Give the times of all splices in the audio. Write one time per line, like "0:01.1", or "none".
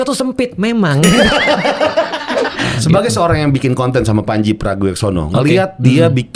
0:02.7